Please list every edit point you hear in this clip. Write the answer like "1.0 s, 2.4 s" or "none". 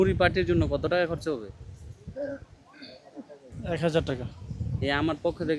none